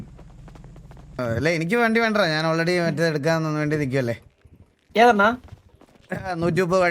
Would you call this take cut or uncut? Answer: cut